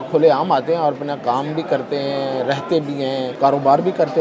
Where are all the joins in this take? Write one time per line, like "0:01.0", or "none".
0:03.3

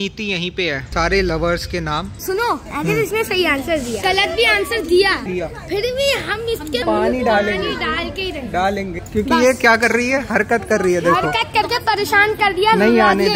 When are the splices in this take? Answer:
0:02.3
0:04.0
0:05.2
0:09.0

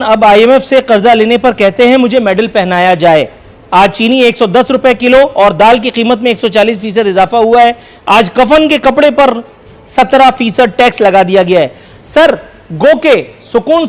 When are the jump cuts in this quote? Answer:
none

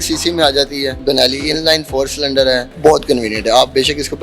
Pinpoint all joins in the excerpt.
0:01.0
0:02.7

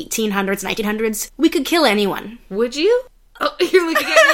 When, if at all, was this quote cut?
0:01.2
0:03.2

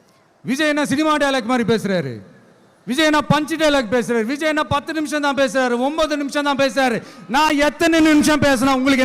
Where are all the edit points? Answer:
none

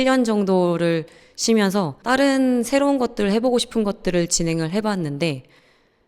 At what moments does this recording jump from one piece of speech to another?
0:02.0

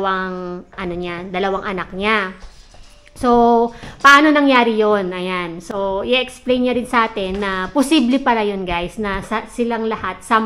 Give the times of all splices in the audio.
none

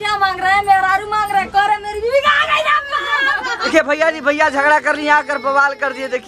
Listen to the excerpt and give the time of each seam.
0:03.7

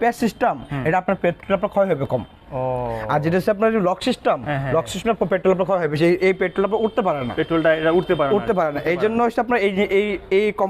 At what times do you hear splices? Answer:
none

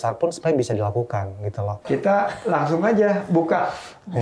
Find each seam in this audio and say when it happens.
0:01.7

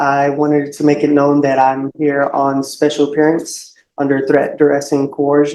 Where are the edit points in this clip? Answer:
none

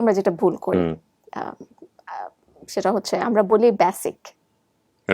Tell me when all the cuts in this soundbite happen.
0:01.2

